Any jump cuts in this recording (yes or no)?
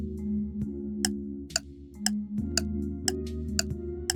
no